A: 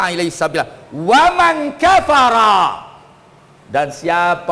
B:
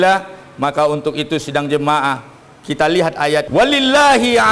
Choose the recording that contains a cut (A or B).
B